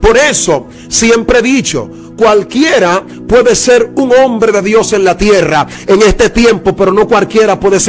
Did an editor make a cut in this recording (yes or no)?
no